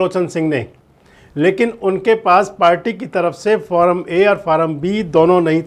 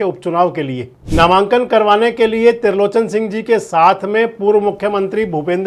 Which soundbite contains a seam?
second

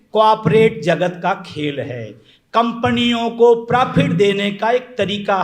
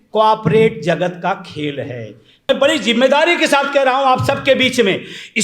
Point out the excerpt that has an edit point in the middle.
second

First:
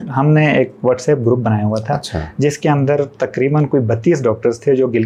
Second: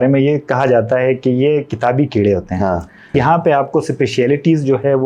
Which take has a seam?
second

